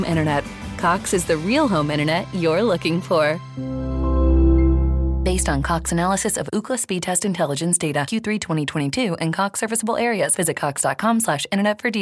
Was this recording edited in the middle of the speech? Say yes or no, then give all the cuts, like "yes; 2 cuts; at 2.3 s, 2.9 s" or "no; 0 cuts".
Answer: no; 0 cuts